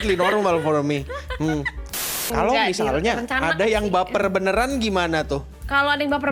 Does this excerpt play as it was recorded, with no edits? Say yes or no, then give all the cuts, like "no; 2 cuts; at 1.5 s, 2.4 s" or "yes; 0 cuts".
no; 1 cut; at 1.8 s